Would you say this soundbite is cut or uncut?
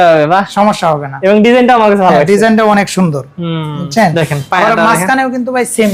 uncut